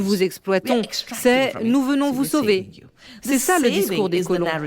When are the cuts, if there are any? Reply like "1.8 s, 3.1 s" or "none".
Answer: 3.3 s